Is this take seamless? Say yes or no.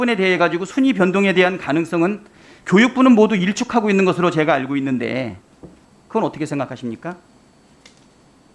no